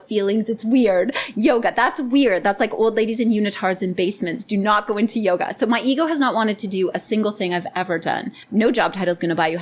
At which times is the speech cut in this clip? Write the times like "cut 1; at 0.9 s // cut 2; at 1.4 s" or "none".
cut 1; at 8.3 s